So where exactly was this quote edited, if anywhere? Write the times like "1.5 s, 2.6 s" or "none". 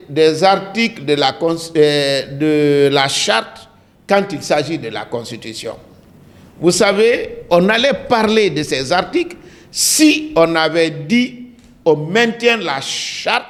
none